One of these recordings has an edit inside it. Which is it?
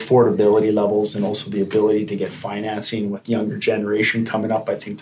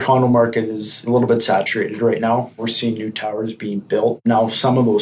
second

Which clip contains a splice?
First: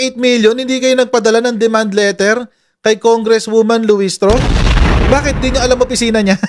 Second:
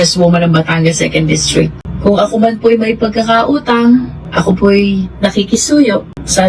second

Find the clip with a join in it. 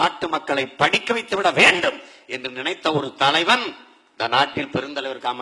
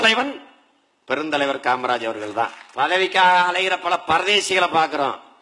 second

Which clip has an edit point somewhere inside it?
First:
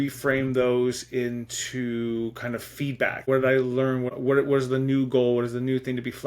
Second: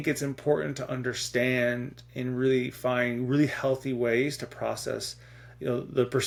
first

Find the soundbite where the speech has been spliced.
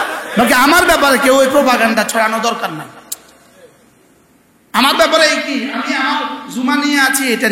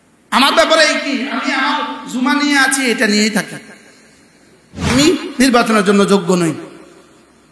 second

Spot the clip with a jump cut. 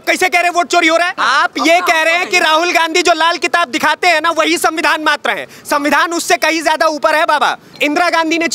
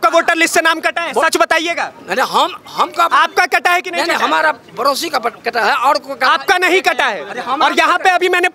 first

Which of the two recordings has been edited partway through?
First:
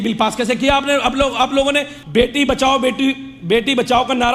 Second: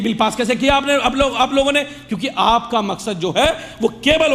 first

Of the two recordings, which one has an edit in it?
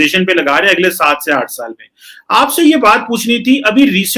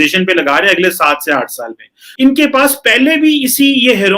second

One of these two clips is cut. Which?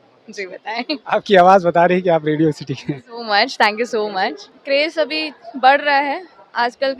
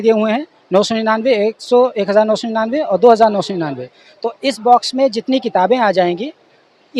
first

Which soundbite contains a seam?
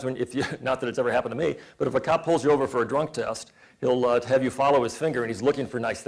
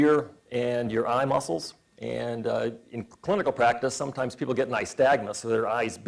second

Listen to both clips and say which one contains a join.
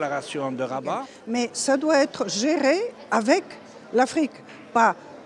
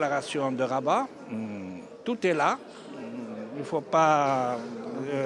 first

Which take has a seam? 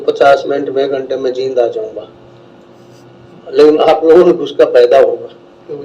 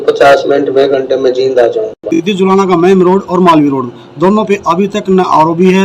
second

